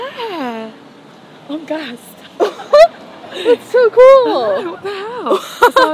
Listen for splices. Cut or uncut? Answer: uncut